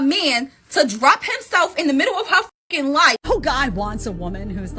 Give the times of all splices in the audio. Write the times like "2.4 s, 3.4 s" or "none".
3.2 s